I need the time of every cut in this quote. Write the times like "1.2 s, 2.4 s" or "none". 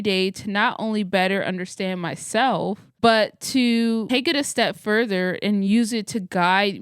2.9 s